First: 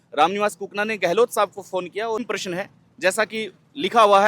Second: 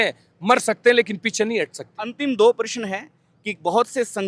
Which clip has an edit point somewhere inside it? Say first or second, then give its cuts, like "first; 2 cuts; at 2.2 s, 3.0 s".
first; 1 cut; at 2.2 s